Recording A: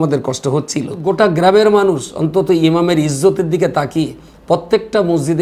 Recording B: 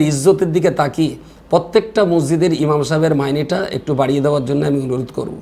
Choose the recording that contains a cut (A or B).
A